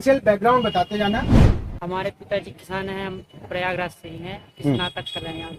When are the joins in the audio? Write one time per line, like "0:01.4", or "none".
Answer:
0:01.4